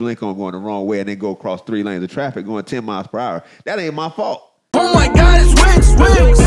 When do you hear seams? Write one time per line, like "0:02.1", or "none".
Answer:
0:04.6